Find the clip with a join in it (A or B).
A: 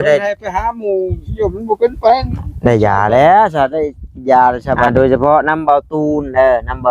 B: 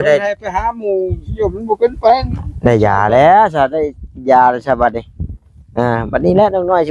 A